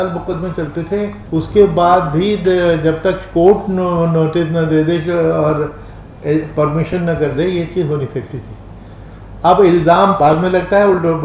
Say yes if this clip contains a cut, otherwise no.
yes